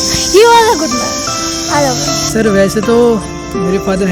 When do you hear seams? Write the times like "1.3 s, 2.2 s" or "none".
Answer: 2.1 s